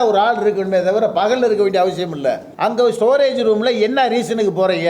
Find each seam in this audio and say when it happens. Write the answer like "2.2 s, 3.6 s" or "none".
2.5 s

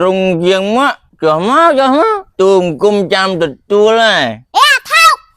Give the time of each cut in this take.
1.0 s, 2.2 s, 4.4 s

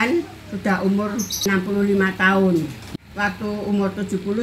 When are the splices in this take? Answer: 1.4 s, 2.8 s

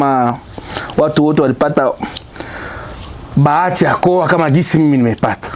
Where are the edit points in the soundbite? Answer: none

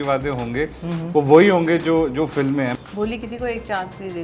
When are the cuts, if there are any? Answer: 2.7 s

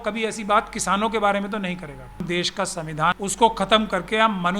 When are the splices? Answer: 2.2 s, 3.2 s

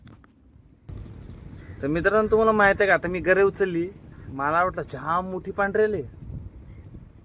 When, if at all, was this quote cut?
0.9 s

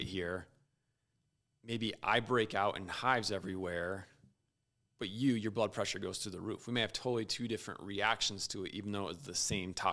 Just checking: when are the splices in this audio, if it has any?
none

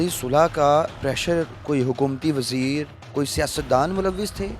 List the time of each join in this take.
0.9 s, 3.0 s

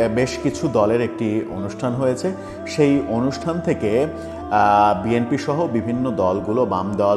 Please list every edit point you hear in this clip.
none

